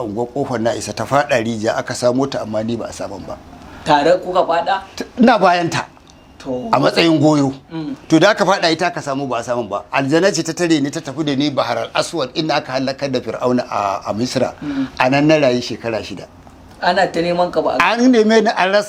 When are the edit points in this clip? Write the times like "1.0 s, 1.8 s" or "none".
none